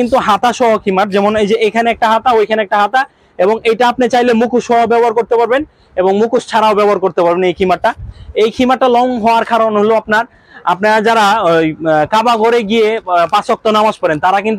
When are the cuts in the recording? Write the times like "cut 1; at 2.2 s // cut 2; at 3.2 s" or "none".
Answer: none